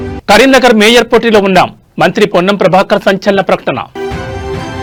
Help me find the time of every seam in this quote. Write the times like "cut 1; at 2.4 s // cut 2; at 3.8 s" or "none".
none